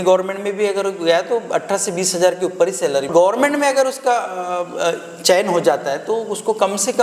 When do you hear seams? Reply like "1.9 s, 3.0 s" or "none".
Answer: 3.1 s

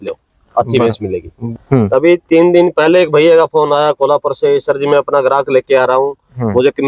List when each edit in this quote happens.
1.3 s

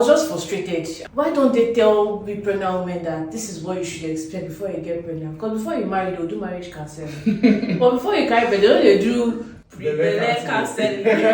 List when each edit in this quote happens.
1.0 s

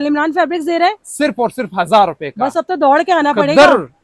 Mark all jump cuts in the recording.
none

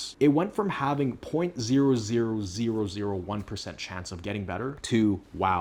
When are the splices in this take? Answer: none

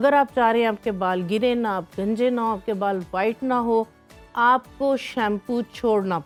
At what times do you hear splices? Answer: none

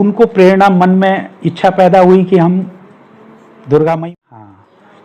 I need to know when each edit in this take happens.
4.1 s

